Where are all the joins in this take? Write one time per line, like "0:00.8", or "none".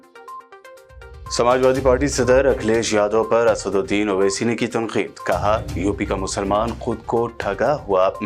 0:01.2